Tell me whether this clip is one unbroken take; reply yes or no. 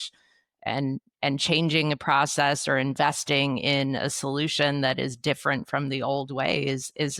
yes